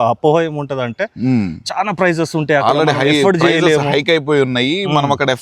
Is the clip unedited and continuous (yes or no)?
yes